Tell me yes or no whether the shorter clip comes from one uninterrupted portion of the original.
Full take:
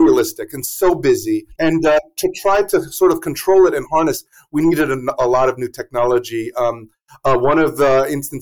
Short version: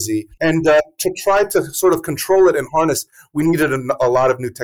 yes